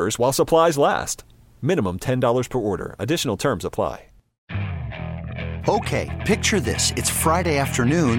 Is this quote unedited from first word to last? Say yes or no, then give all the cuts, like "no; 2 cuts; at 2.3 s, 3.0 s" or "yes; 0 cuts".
no; 1 cut; at 4.3 s